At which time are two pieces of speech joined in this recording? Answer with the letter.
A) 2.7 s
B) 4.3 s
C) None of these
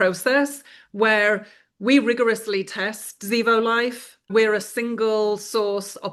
B